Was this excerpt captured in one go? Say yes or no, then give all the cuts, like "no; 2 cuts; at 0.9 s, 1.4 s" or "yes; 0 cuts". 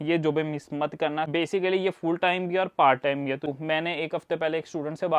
no; 2 cuts; at 1.3 s, 3.5 s